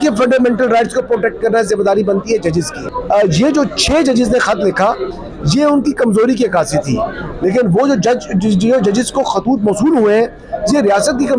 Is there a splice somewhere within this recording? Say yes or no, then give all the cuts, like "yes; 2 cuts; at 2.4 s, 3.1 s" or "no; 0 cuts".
no; 0 cuts